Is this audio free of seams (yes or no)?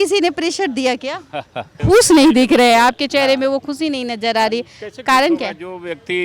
no